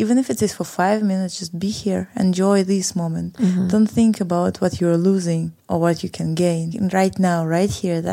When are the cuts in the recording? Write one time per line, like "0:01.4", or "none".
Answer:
0:05.6
0:06.7